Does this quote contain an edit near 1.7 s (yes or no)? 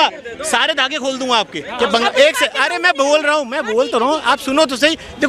yes